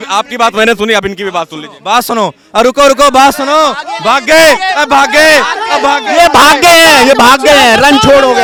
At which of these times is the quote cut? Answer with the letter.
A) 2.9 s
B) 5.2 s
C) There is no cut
C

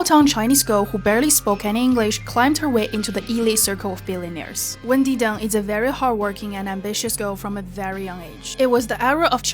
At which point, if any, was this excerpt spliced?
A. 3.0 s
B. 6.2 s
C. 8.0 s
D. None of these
C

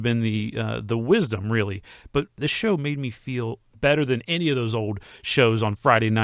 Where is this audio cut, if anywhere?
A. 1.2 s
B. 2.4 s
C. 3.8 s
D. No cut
B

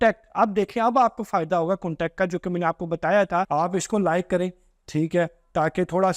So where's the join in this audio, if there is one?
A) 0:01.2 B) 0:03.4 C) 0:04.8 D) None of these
B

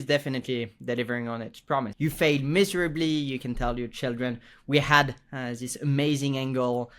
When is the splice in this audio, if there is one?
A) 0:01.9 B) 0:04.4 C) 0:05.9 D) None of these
A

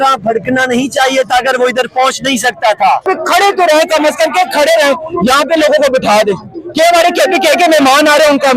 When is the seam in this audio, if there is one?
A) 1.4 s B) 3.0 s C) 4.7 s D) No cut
B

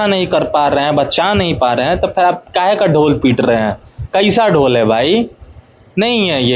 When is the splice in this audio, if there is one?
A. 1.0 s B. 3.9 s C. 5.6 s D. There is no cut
D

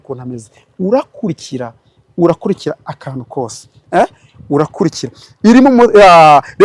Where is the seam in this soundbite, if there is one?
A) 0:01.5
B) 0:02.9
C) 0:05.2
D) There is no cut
D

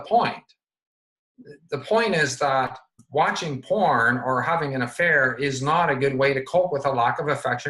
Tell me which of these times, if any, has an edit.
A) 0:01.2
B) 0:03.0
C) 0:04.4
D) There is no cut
B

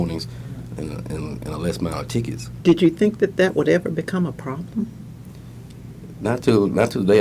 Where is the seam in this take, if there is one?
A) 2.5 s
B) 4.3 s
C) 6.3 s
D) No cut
A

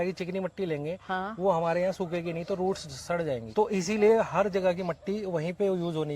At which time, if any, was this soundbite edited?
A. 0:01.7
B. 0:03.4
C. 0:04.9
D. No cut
B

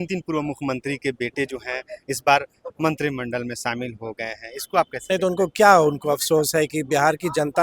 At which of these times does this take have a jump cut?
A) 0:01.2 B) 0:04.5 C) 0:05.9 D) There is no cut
D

